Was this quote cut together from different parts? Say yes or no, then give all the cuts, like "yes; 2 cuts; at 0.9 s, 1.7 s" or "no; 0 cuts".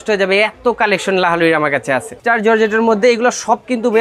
yes; 1 cut; at 2.2 s